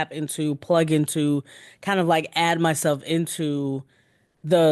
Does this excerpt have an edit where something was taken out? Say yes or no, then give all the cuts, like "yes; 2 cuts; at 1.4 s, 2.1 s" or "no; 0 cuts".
no; 0 cuts